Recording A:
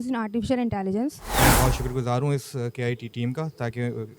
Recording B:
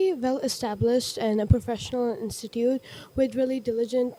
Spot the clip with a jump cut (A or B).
A